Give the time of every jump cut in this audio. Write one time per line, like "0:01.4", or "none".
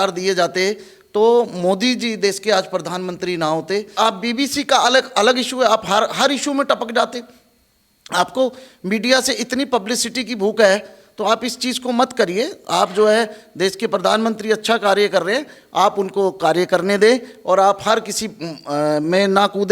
0:04.0